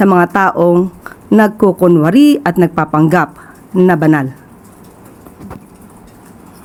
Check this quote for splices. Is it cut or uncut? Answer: uncut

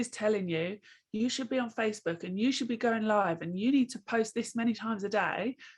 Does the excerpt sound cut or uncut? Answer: uncut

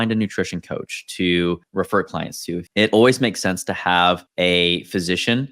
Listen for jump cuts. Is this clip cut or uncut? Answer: cut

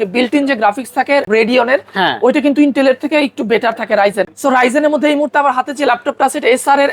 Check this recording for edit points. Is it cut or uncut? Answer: cut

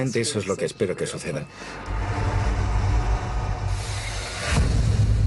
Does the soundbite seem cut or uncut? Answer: cut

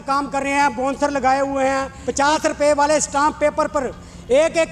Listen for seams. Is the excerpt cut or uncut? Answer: cut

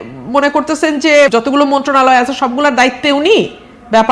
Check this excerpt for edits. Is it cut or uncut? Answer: cut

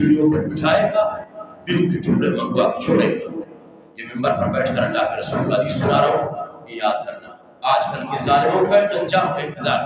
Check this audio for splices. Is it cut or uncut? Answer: uncut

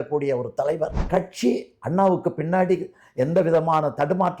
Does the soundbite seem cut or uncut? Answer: cut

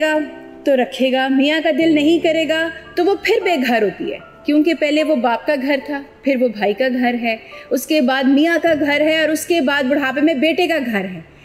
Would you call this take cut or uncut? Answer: uncut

